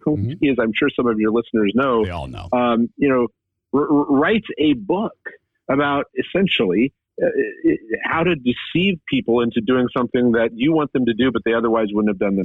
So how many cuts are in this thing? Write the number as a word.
zero